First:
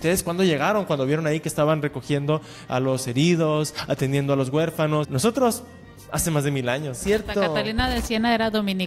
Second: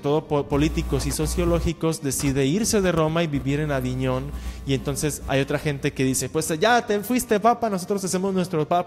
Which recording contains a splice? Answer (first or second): first